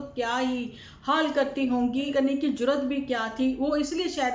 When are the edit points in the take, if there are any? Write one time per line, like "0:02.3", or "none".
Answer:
0:02.1